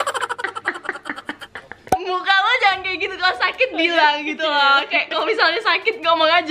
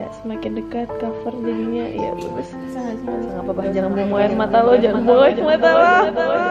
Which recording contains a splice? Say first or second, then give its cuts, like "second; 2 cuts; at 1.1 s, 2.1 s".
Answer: first; 1 cut; at 1.8 s